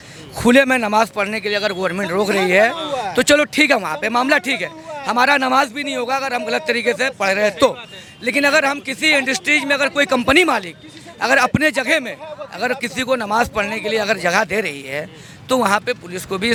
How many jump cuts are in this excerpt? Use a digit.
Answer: 0